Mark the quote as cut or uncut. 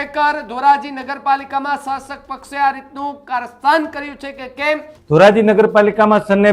cut